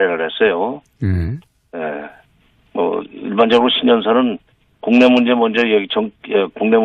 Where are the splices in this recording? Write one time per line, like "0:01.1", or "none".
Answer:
0:03.8